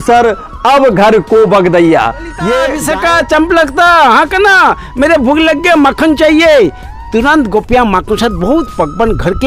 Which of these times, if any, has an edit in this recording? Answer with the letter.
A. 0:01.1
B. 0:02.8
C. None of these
B